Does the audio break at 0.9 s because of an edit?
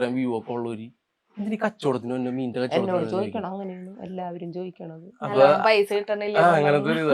no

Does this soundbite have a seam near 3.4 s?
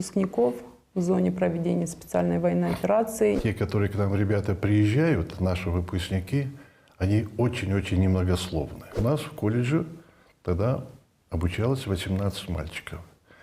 yes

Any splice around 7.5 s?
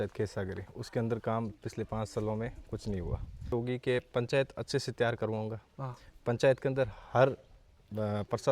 no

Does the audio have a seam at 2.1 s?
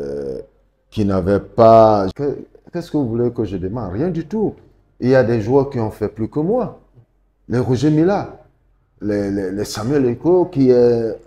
yes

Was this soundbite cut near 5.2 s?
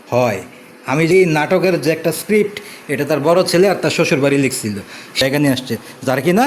yes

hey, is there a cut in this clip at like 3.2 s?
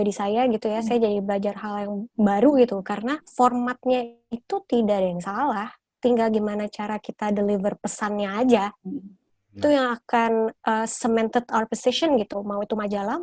yes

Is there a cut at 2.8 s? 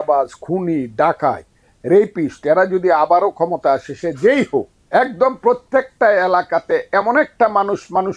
no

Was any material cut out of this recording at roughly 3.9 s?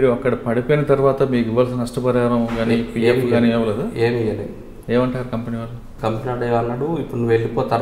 no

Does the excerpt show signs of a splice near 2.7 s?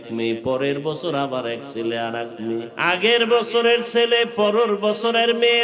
yes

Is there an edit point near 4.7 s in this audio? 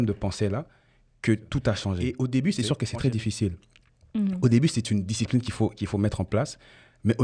no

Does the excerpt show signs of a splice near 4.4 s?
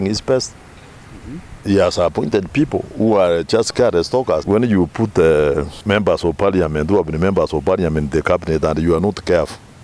yes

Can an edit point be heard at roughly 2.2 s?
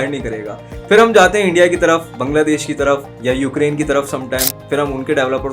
yes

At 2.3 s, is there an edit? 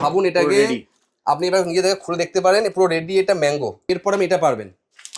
no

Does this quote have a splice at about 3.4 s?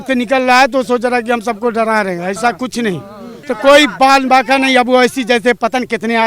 yes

